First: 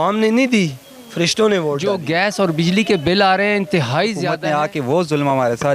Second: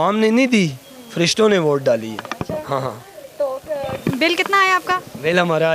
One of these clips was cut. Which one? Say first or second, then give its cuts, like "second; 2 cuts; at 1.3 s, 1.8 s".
first; 2 cuts; at 1.9 s, 4.3 s